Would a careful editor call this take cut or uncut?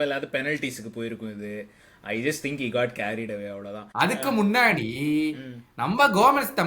cut